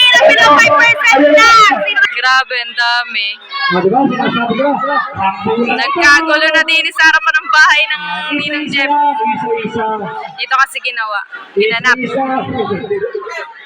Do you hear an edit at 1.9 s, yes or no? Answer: yes